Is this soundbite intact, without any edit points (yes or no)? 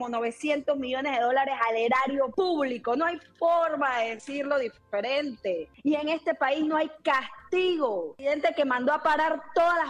no